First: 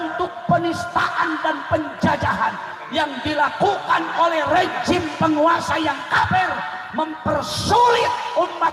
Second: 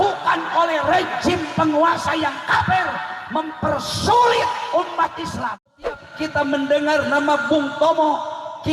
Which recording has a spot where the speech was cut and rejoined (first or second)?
second